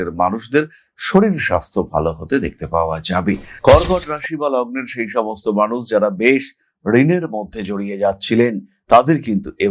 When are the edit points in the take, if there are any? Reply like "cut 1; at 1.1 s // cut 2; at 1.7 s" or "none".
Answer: cut 1; at 3.5 s